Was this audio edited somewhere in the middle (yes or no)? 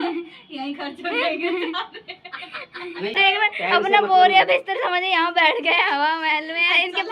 yes